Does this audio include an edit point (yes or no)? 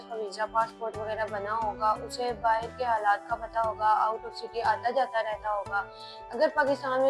no